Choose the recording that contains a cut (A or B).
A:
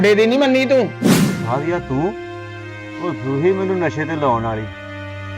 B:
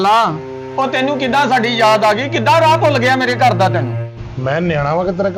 A